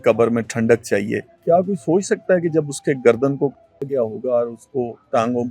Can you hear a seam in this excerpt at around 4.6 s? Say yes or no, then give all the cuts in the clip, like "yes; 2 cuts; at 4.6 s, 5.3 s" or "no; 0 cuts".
no; 1 cut; at 1.3 s